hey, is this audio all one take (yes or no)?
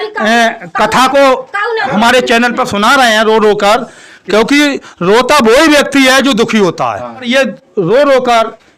no